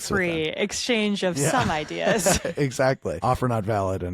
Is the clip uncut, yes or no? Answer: no